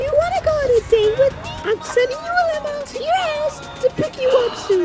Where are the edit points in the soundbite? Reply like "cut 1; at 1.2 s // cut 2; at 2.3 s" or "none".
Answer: cut 1; at 1.5 s // cut 2; at 2.9 s